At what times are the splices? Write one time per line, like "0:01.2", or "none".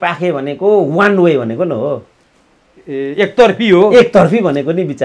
none